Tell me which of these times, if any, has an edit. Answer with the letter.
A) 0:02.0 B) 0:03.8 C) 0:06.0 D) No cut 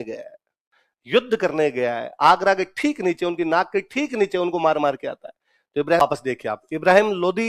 C